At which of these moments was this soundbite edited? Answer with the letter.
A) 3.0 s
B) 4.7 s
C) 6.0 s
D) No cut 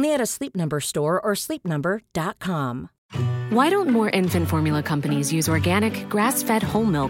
A